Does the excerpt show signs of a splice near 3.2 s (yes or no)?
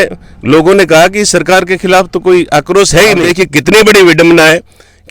yes